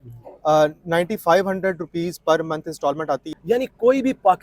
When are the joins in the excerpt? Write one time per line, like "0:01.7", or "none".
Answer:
0:03.3